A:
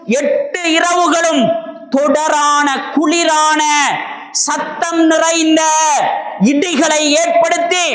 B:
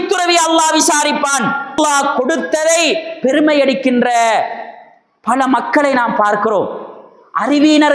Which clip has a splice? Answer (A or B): B